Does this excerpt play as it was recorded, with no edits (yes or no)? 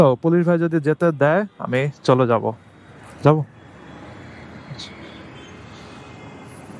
yes